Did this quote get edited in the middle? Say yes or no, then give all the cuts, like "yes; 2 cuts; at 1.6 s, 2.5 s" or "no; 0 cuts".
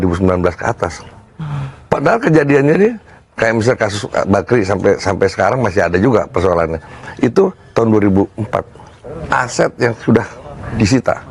yes; 1 cut; at 9.1 s